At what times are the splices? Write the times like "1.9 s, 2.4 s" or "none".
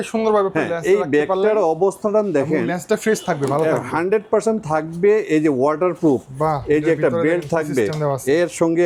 none

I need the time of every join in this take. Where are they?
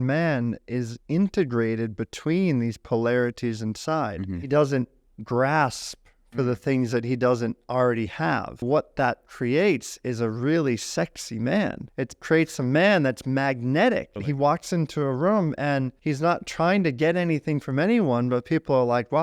4.4 s, 8.6 s, 11.8 s, 14.2 s, 15.9 s

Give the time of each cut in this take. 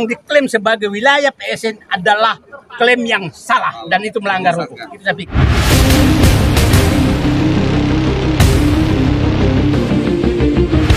none

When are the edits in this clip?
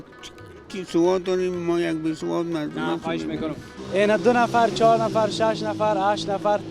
3.7 s

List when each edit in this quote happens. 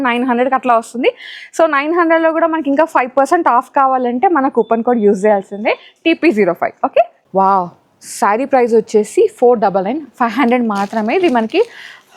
7.2 s

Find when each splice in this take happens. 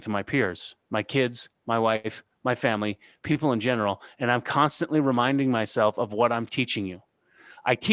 none

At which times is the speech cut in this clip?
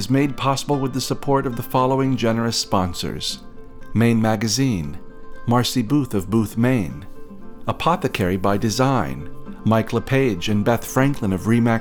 none

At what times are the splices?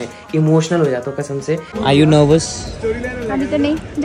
1.7 s

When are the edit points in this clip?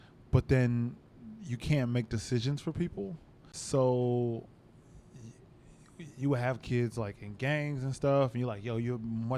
3.5 s

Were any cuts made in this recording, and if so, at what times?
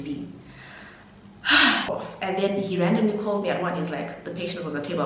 1.9 s

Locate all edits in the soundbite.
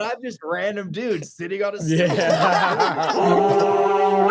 3.1 s

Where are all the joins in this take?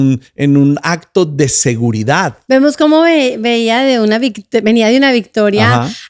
2.4 s

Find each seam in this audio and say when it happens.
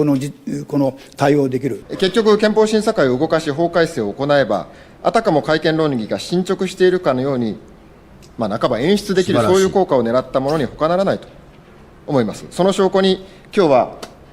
1.8 s

